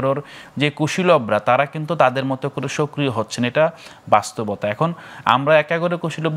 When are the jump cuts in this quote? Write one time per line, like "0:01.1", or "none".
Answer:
none